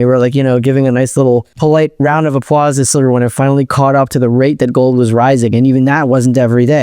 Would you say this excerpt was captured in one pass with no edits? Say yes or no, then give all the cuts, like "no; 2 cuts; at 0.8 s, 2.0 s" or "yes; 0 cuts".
no; 1 cut; at 1.5 s